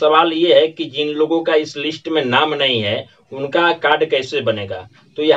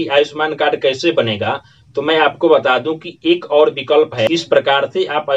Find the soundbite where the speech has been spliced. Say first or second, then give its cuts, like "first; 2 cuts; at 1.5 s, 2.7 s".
second; 1 cut; at 4.3 s